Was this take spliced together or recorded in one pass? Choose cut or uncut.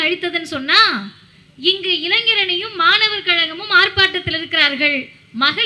uncut